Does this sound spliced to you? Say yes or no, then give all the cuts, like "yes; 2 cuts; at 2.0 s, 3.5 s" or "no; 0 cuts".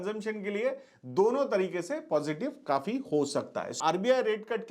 yes; 1 cut; at 3.8 s